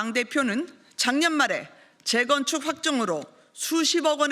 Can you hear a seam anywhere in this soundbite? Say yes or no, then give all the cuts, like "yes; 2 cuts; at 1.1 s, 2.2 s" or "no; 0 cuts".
no; 0 cuts